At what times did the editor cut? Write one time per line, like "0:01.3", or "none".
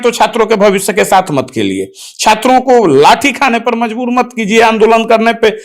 none